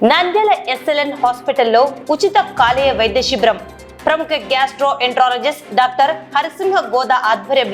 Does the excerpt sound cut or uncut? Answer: uncut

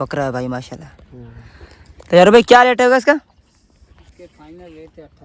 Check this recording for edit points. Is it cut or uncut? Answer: uncut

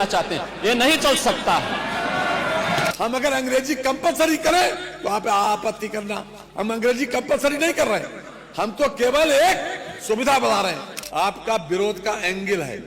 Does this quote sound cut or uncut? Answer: cut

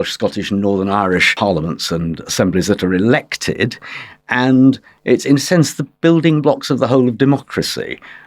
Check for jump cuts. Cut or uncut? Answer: cut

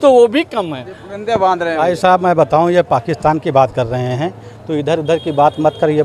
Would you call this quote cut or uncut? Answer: uncut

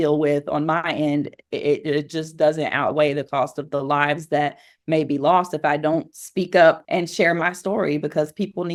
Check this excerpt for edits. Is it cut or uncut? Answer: uncut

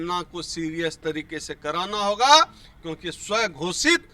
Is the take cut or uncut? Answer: uncut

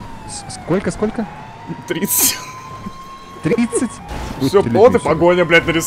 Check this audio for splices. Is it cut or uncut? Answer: cut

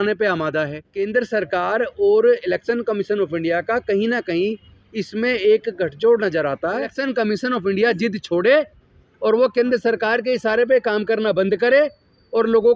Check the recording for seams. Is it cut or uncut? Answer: cut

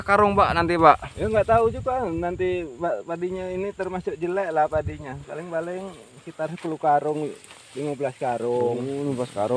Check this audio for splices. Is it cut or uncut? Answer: uncut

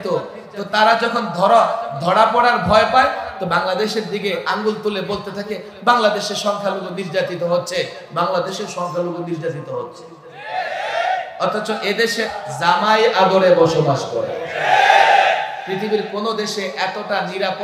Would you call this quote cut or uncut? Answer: cut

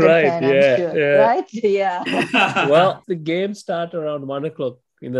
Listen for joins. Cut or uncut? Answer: cut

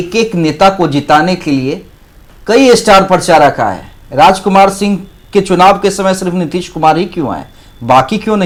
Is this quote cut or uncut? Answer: uncut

